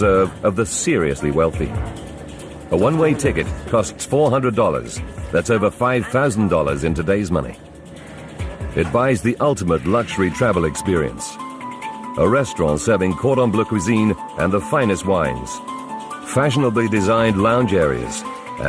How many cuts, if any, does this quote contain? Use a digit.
0